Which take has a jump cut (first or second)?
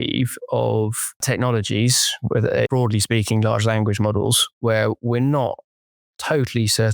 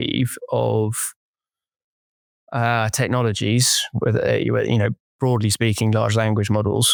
first